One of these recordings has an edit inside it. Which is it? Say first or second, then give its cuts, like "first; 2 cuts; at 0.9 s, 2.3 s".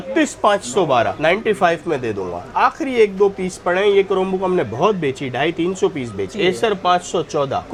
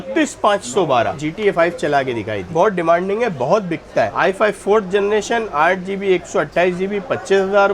second; 3 cuts; at 1.2 s, 2.4 s, 4.1 s